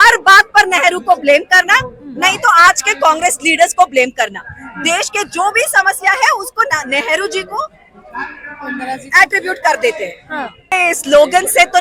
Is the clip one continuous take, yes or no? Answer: no